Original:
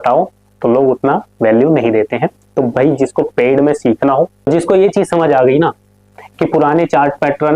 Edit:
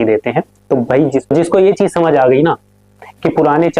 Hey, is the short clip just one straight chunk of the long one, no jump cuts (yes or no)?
no